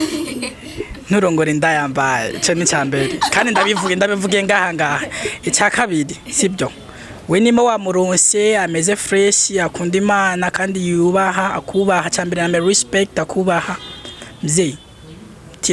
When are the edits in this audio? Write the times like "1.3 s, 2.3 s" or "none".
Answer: none

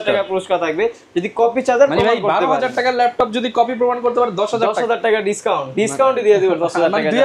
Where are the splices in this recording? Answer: none

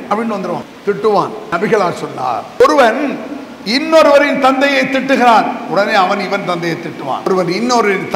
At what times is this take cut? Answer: 1.1 s, 2.6 s, 7.3 s

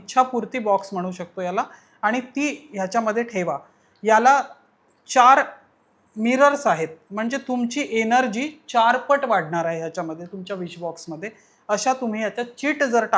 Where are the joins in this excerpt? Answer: none

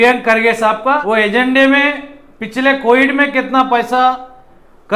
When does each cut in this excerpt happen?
1.0 s

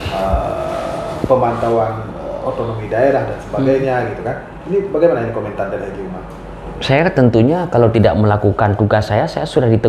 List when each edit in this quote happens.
none

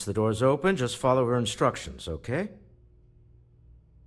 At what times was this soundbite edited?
2.7 s

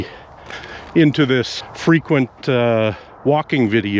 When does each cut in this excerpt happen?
1.6 s, 3.1 s

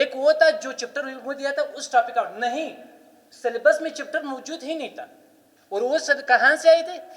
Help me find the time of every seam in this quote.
none

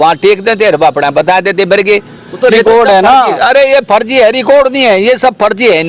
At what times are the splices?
none

